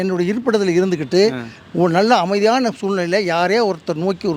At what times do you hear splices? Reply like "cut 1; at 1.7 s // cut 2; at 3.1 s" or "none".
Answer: none

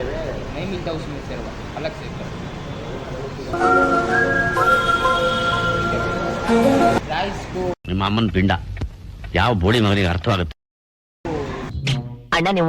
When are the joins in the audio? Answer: cut 1; at 3.5 s // cut 2; at 7.0 s // cut 3; at 11.7 s

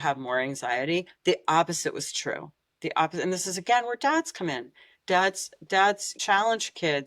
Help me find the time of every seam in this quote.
cut 1; at 6.2 s

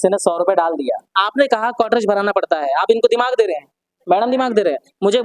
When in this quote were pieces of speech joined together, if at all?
cut 1; at 1.2 s

